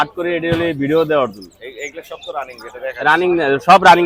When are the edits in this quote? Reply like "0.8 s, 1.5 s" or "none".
none